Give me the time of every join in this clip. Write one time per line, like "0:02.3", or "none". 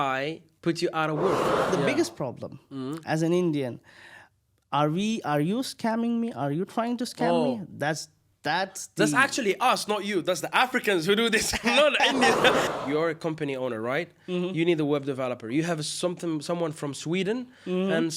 0:01.7
0:12.6